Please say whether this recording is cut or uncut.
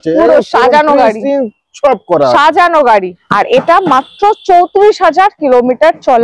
cut